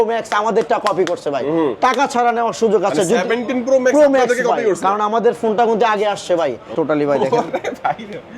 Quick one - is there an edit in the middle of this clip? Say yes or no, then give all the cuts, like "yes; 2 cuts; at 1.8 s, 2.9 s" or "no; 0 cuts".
yes; 1 cut; at 6.7 s